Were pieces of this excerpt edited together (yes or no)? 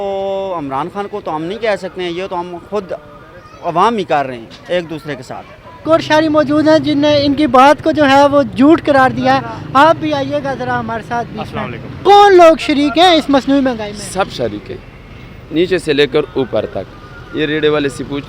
yes